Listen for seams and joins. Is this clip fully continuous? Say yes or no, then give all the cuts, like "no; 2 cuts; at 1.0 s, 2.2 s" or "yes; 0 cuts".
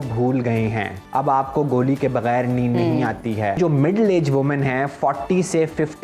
no; 2 cuts; at 1.0 s, 3.6 s